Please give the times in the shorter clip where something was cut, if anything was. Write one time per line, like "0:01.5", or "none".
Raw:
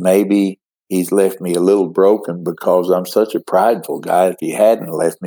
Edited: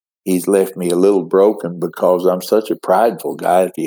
none